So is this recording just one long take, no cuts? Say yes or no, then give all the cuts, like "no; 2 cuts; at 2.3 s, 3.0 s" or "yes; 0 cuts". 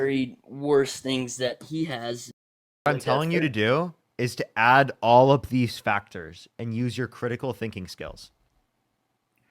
no; 1 cut; at 2.9 s